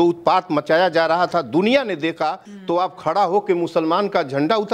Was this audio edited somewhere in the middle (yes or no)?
yes